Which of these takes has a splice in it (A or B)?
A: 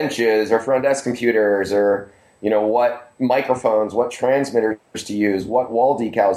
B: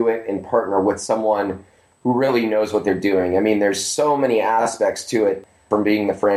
B